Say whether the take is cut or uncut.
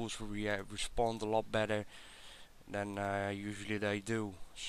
uncut